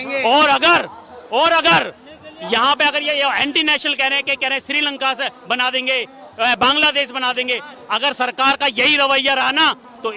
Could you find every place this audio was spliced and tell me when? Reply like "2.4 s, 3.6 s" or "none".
none